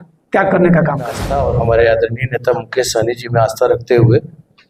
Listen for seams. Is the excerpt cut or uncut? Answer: cut